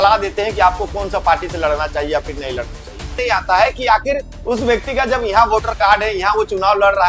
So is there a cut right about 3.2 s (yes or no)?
yes